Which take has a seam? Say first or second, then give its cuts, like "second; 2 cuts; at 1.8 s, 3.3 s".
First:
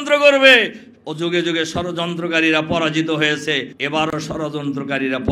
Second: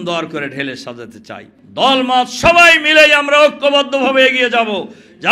second; 1 cut; at 1.5 s